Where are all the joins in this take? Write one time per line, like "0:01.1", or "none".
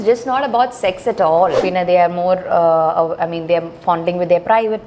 0:01.6